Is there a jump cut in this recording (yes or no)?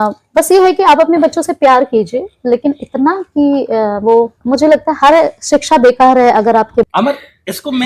yes